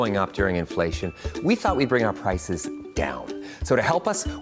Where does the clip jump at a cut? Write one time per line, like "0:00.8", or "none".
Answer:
none